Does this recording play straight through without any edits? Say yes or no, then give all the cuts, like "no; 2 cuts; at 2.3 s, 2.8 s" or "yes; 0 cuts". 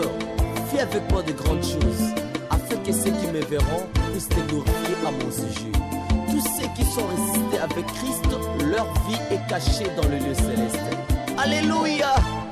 yes; 0 cuts